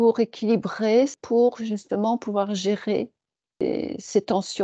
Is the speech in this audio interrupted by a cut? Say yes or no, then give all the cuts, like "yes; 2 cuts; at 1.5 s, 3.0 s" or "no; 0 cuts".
yes; 2 cuts; at 1.2 s, 3.6 s